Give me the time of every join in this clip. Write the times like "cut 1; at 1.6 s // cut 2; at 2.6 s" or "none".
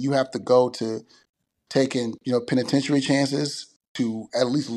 cut 1; at 3.8 s